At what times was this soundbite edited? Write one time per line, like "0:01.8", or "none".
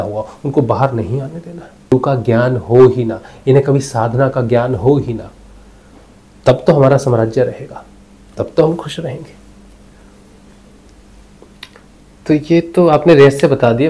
0:01.9